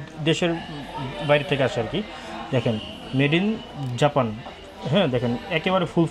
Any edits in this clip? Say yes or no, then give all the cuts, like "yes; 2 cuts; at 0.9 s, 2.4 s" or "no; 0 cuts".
no; 0 cuts